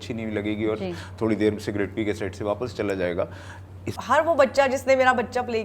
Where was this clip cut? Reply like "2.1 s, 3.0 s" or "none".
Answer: 3.9 s